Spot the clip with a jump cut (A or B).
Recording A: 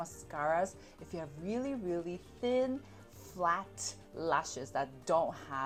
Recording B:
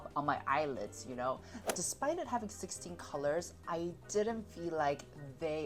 B